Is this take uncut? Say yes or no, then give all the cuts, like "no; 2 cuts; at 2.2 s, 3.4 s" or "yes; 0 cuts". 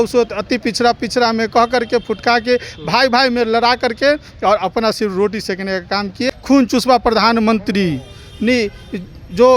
no; 1 cut; at 6.3 s